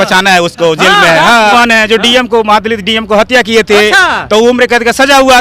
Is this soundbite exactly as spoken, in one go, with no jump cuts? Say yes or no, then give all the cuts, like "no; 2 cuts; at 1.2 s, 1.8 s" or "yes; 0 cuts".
no; 1 cut; at 1.5 s